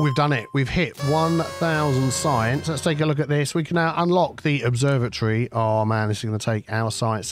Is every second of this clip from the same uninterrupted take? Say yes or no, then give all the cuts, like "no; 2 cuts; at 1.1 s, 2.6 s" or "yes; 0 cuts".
yes; 0 cuts